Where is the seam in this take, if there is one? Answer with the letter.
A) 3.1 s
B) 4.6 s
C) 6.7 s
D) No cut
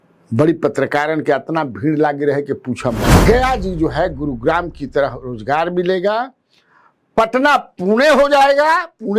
A